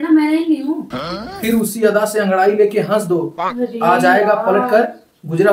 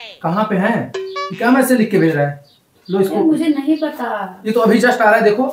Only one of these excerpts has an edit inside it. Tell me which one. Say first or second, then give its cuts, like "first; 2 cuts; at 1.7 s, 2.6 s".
first; 1 cut; at 1.1 s